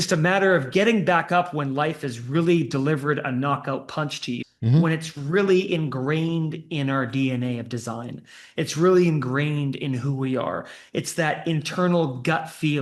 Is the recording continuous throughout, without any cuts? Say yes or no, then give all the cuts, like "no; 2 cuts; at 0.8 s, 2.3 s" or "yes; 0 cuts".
no; 1 cut; at 4.4 s